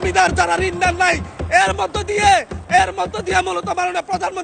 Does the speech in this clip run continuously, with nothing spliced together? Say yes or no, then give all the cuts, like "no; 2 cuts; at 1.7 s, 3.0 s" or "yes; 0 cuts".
yes; 0 cuts